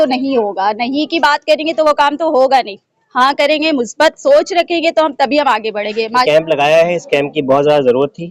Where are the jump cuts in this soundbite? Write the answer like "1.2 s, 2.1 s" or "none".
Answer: 6.2 s